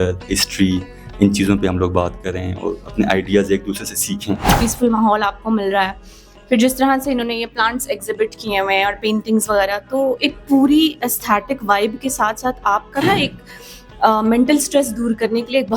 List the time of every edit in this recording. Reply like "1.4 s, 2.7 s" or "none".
4.5 s